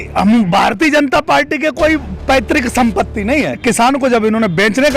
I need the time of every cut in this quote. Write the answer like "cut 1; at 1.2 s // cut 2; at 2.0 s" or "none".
cut 1; at 3.6 s